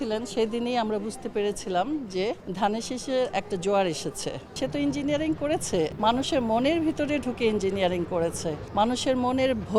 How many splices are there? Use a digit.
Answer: 4